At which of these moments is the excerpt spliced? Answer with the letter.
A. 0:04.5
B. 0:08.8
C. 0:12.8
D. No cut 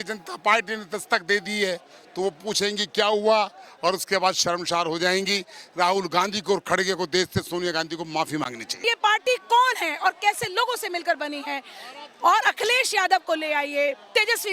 B